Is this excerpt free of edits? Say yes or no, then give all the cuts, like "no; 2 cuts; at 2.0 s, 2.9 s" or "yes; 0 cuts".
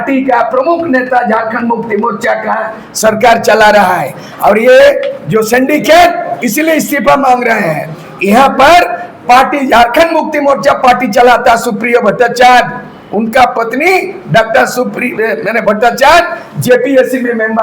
yes; 0 cuts